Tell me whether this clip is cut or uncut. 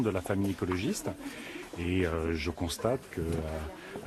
uncut